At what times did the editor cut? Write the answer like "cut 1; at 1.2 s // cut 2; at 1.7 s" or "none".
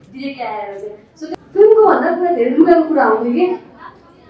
cut 1; at 1.3 s